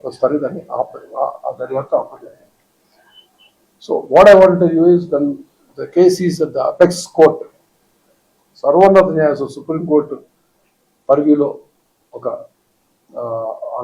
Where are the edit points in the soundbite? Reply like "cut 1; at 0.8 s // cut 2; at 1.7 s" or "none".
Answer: none